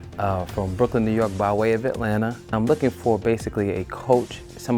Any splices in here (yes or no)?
yes